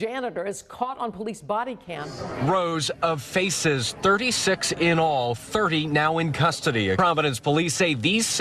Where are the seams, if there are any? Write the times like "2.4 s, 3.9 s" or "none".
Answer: 2.2 s, 7.0 s